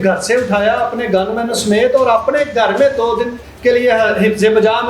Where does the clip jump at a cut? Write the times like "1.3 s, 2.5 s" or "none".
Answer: 3.4 s